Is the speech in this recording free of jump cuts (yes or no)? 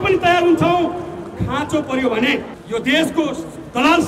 no